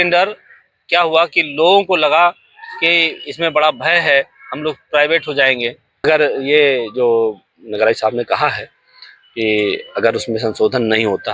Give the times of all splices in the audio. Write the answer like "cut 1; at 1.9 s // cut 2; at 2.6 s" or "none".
cut 1; at 6.0 s